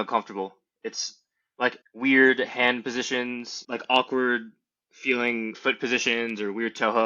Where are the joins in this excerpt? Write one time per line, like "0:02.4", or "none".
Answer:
0:01.8
0:03.5
0:05.5